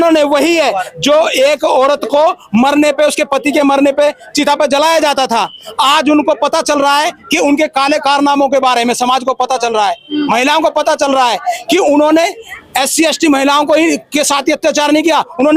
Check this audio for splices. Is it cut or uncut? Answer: uncut